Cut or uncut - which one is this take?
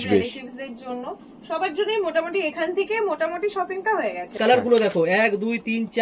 cut